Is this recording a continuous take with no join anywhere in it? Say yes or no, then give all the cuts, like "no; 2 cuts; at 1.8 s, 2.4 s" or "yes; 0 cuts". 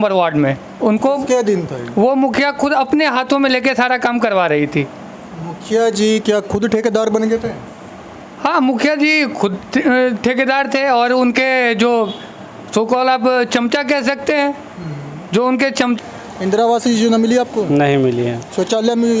no; 1 cut; at 16.0 s